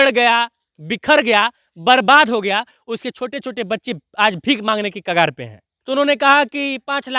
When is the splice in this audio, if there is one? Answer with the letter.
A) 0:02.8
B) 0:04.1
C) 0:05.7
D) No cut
C